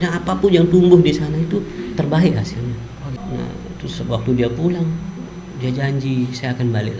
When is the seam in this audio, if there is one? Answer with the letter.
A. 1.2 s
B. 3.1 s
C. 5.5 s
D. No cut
B